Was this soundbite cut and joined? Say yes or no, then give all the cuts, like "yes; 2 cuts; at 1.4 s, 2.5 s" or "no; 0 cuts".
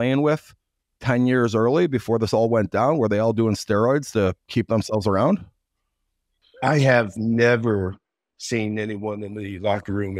no; 0 cuts